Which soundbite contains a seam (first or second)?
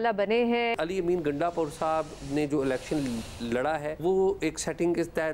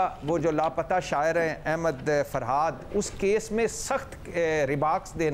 first